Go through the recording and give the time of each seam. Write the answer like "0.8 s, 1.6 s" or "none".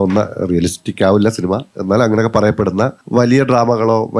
3.0 s